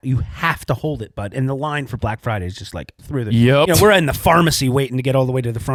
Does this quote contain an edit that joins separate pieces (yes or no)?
no